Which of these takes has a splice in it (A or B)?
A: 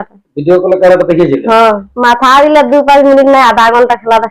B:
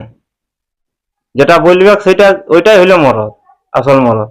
A